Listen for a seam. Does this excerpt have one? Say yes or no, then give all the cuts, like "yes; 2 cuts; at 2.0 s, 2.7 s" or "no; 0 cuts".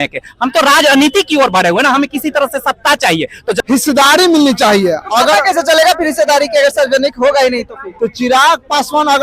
yes; 1 cut; at 3.6 s